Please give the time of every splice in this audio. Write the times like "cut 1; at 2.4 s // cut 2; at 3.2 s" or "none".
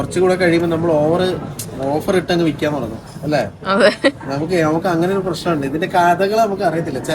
none